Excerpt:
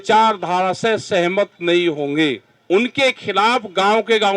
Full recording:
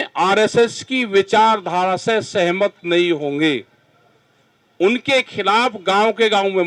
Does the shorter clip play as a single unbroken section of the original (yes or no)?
no